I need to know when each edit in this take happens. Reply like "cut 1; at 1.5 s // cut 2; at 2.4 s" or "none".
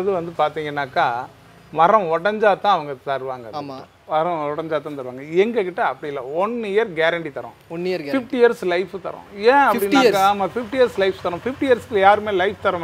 none